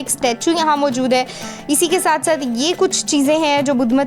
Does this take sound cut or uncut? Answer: uncut